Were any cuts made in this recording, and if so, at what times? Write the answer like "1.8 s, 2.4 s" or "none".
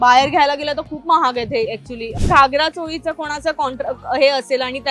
2.1 s